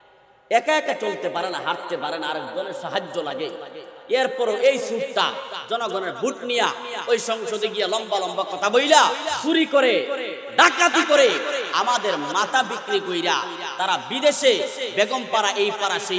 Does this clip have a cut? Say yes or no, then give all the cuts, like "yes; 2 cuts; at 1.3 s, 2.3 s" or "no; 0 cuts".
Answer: yes; 2 cuts; at 5.5 s, 9.3 s